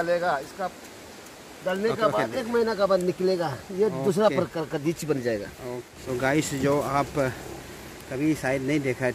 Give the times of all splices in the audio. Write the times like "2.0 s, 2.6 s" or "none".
5.9 s

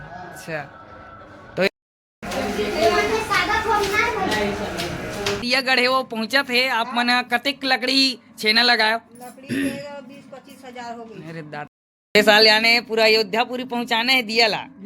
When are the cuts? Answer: 1.7 s, 5.4 s, 11.9 s

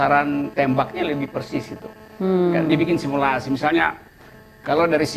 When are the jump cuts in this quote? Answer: none

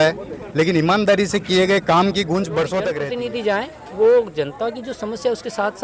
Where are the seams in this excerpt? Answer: 3.0 s

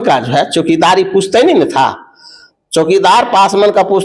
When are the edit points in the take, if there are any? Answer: none

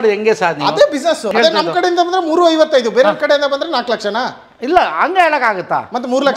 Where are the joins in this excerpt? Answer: 1.3 s

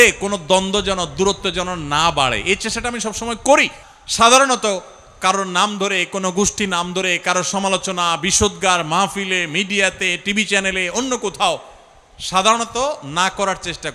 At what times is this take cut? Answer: 3.8 s

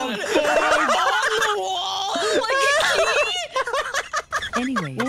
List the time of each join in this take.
none

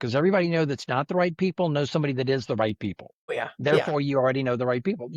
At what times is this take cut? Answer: 3.4 s

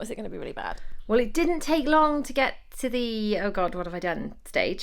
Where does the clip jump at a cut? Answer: 1.0 s

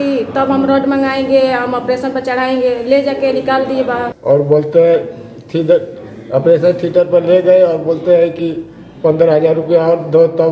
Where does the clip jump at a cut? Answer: 4.1 s

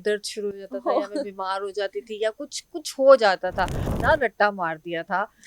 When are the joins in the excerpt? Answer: 3.9 s

